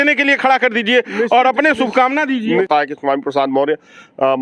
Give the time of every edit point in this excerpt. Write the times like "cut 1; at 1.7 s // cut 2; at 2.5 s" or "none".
cut 1; at 2.7 s